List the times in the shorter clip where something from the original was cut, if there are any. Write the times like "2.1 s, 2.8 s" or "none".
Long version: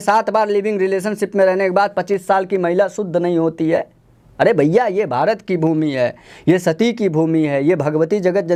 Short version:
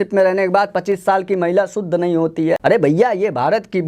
2.6 s